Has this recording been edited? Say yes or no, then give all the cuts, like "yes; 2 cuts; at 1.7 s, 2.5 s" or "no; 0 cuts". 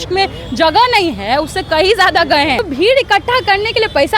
yes; 1 cut; at 2.6 s